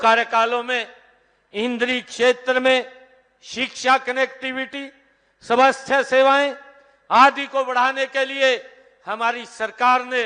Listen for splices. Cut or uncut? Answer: uncut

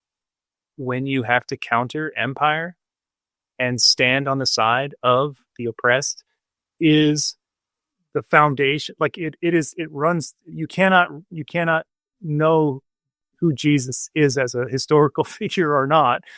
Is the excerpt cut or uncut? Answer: uncut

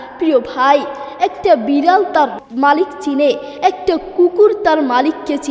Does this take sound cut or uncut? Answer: cut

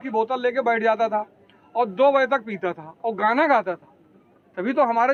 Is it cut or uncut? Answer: uncut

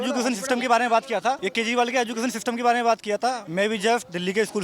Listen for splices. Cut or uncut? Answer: cut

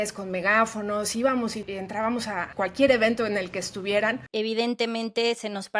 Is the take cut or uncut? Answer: cut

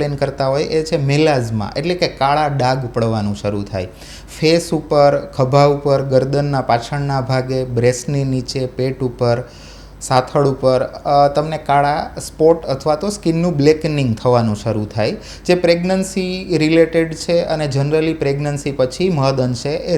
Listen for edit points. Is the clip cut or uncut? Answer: uncut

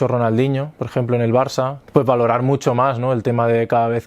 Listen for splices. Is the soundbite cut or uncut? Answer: cut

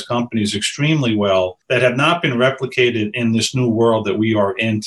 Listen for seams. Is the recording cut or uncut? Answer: cut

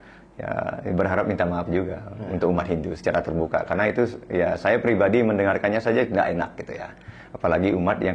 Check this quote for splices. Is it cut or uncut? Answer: uncut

